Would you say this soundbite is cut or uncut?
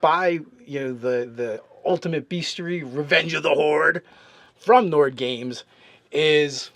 cut